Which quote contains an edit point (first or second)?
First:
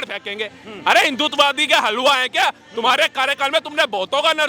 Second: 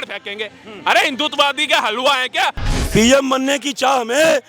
second